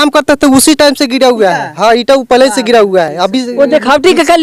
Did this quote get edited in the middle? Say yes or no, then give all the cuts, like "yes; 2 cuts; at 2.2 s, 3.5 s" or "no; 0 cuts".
no; 0 cuts